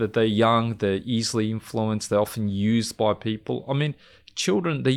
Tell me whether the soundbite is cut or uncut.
uncut